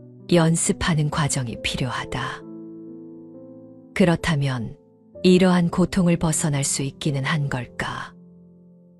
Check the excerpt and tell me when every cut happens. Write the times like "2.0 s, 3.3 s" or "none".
8.1 s